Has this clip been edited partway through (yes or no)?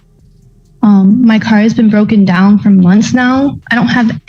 no